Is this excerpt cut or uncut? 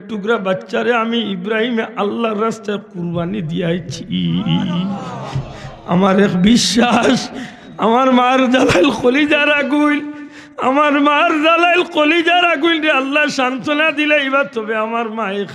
uncut